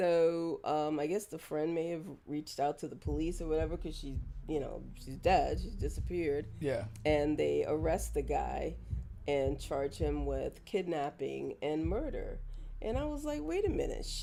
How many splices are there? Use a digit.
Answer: 0